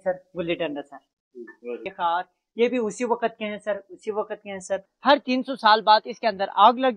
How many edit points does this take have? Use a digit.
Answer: 2